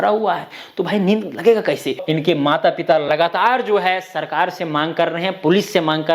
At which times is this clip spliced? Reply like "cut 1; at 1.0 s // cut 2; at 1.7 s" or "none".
cut 1; at 2.0 s